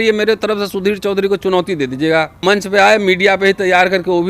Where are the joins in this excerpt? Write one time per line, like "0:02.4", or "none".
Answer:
0:02.4